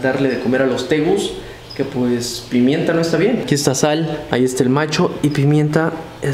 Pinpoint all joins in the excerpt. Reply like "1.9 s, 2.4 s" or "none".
4.2 s